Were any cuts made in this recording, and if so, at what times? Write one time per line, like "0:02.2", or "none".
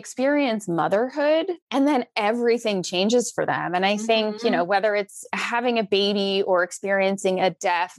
0:01.6